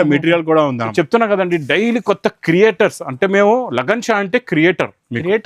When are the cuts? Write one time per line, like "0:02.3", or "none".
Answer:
0:00.9